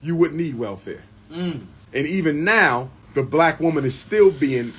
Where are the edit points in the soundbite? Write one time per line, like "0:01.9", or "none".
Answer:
0:01.7
0:03.0